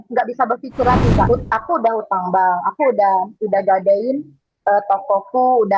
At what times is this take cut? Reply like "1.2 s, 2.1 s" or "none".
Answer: 1.3 s